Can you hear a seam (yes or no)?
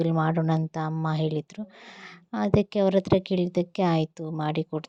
no